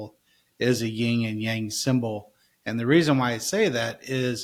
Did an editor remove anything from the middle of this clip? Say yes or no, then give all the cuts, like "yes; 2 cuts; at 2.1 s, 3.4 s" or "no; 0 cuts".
no; 0 cuts